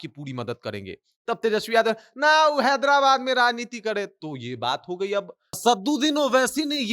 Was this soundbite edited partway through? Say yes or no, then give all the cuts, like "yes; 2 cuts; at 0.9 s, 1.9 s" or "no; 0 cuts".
yes; 1 cut; at 5.6 s